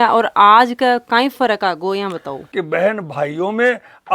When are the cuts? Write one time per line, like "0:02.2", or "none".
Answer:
0:02.4

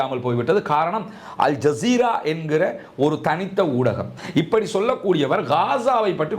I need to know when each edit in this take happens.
0:04.2

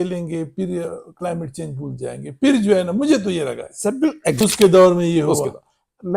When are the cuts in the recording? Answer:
0:04.4

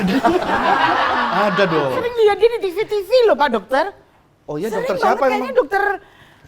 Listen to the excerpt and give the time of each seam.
0:02.0

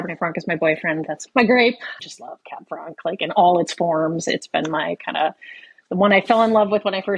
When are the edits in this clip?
none

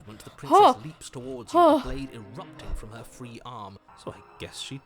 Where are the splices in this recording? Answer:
0:03.9

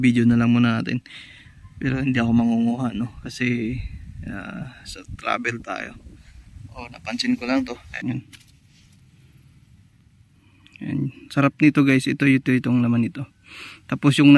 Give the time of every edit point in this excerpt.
0:07.9

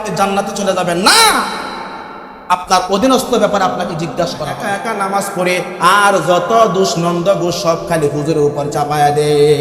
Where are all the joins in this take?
0:04.7

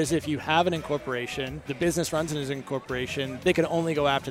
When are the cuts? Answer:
0:01.6
0:03.3

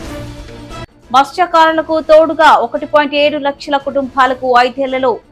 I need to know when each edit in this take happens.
0:01.0

